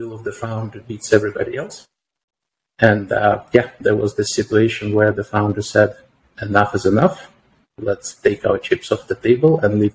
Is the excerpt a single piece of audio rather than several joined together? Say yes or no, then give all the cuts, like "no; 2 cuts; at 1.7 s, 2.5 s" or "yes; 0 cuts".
yes; 0 cuts